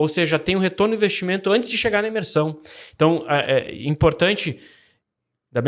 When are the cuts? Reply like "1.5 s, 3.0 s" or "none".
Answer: none

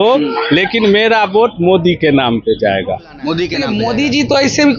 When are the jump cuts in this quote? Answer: 3.6 s

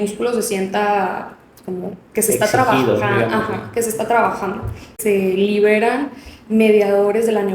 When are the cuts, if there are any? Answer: 5.0 s

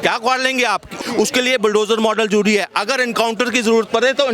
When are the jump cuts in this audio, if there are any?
0.9 s

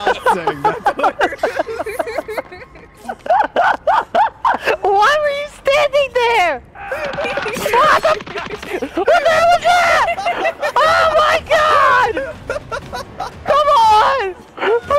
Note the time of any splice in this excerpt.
none

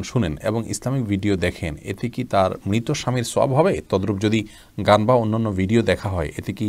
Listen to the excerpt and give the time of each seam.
none

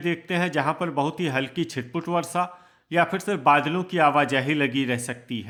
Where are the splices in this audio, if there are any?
none

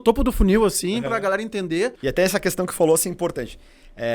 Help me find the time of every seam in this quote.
2.0 s

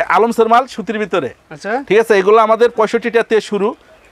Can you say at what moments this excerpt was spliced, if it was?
none

